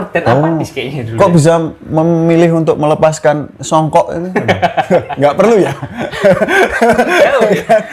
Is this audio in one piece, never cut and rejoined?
yes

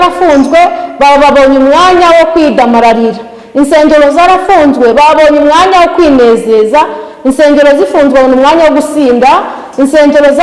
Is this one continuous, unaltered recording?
yes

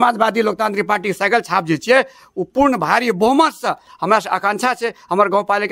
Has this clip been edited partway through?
no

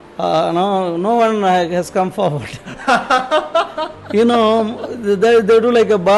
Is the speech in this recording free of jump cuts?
yes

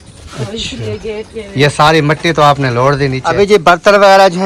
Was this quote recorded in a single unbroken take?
no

